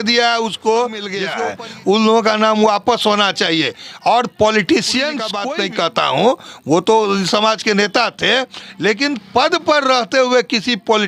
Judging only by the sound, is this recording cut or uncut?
cut